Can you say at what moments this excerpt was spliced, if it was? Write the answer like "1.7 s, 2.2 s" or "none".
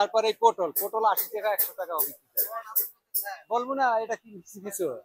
none